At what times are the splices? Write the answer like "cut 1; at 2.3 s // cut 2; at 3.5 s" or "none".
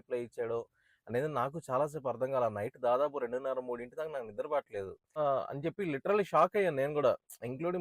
cut 1; at 5.2 s